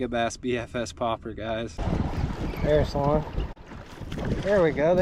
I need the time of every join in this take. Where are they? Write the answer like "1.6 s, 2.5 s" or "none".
1.8 s